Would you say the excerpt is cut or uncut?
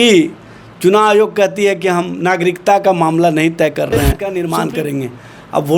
cut